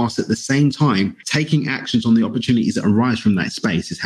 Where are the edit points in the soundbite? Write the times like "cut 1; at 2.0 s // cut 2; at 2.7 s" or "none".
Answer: cut 1; at 1.2 s